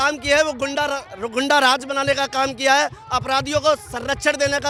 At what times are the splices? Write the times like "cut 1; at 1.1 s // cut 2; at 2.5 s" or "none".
none